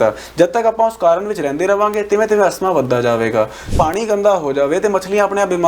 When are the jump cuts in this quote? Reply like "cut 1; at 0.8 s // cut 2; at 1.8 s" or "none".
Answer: cut 1; at 3.7 s